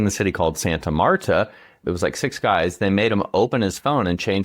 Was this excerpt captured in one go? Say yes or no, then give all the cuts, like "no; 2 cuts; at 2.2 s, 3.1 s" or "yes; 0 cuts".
no; 1 cut; at 1.8 s